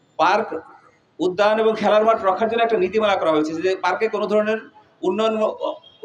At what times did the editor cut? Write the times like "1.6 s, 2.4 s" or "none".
none